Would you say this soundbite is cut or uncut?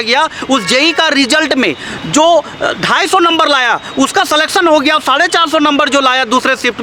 uncut